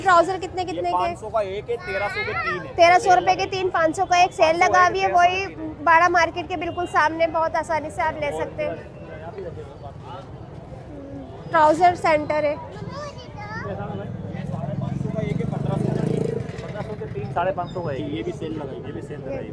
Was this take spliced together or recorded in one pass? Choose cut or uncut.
uncut